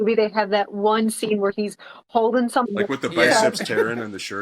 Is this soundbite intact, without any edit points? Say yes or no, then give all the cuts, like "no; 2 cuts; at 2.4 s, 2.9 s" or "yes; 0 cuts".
no; 1 cut; at 2.7 s